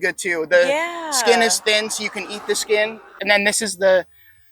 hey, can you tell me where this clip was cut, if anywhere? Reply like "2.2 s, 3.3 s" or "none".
3.1 s